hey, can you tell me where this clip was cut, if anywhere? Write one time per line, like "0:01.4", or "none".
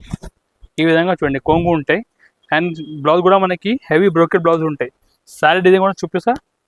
none

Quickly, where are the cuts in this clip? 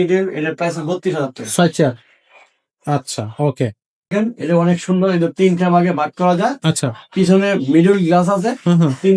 0:04.1

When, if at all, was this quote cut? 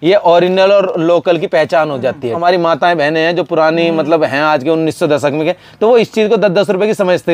0:02.4

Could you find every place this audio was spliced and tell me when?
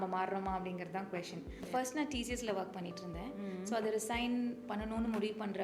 0:01.6

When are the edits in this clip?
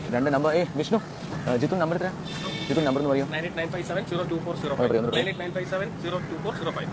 none

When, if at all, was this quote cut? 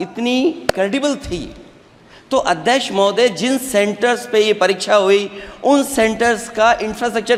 none

